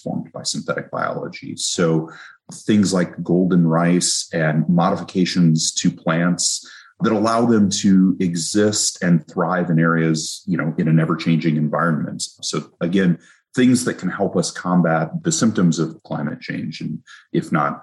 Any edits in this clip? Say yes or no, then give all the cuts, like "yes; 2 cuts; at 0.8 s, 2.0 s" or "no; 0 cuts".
no; 0 cuts